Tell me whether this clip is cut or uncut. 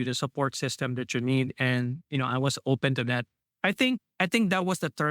cut